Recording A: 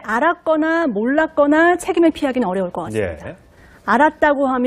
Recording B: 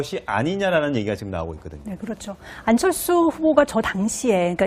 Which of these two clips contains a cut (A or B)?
B